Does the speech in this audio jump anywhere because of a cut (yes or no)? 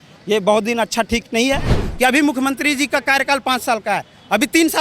yes